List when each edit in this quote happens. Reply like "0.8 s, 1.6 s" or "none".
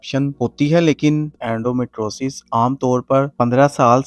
1.3 s